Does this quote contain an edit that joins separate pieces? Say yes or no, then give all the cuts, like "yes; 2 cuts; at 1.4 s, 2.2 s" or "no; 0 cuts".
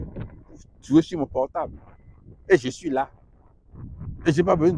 no; 0 cuts